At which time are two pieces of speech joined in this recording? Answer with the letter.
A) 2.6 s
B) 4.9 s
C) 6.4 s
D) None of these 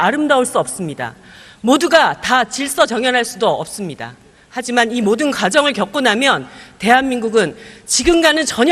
B